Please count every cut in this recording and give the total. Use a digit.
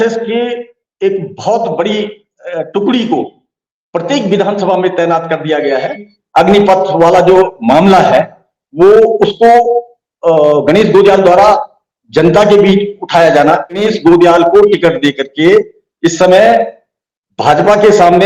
2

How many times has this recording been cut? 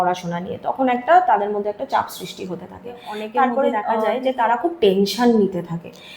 1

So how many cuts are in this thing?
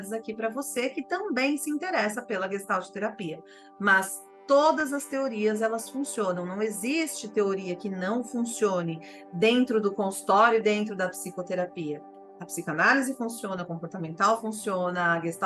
1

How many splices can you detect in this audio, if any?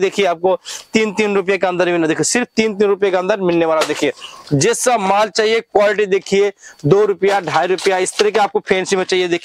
0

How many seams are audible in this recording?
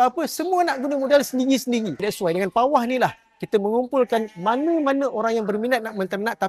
1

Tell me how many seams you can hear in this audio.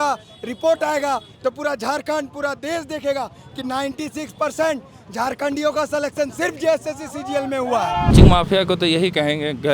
1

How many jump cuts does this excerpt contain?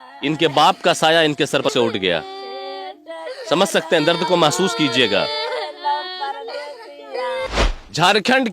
2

